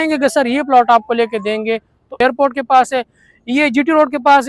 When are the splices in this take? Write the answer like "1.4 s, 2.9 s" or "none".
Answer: 2.1 s